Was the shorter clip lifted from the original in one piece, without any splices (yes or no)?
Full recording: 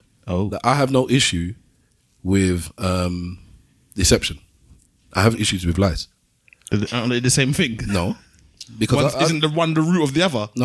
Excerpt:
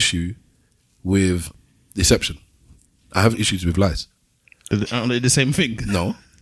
no